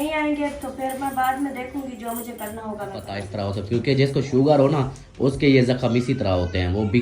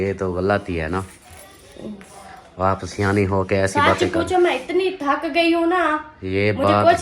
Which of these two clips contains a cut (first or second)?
first